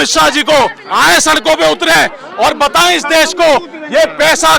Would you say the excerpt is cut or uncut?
uncut